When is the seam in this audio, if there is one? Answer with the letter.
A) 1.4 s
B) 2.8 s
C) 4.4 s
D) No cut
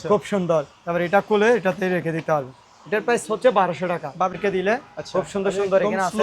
C